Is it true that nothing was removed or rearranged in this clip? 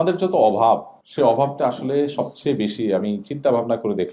no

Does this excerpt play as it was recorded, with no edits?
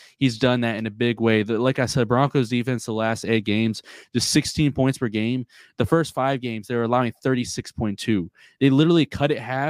yes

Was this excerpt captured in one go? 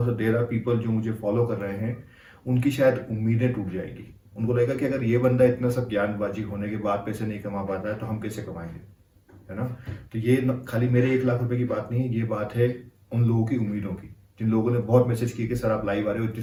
yes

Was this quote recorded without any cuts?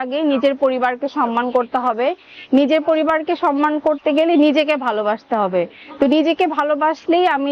yes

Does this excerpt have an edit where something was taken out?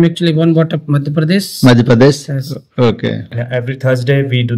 yes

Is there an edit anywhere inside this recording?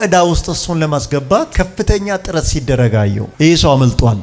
no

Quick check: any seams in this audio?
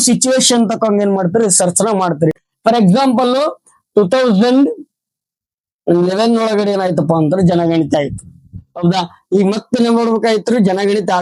no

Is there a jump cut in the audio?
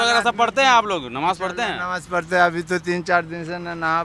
no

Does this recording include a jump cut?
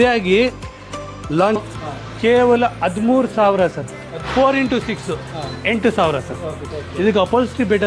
yes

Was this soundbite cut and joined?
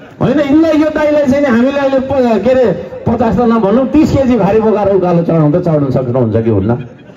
no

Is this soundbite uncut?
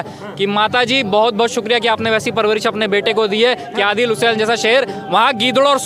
yes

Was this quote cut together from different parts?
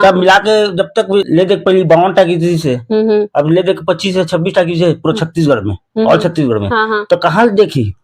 yes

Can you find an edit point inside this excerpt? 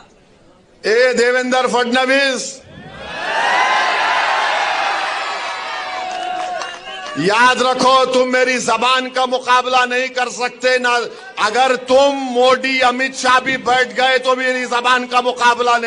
no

